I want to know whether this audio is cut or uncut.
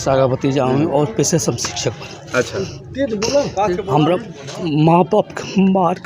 uncut